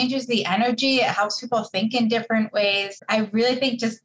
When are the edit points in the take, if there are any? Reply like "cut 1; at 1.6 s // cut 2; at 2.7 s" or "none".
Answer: cut 1; at 3.0 s